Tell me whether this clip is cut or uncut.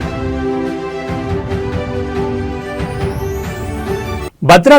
uncut